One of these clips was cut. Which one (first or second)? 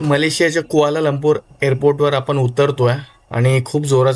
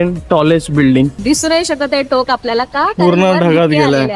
second